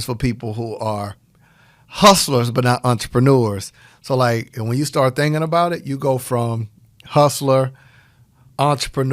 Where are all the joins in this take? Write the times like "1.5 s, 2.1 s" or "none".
none